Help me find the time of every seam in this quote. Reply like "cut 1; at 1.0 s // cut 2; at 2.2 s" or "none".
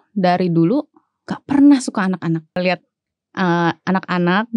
cut 1; at 2.6 s